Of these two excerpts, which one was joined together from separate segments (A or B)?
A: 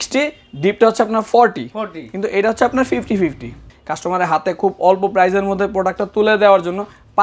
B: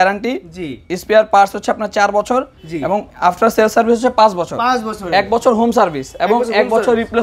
A